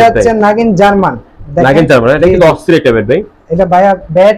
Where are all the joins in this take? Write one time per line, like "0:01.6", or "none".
none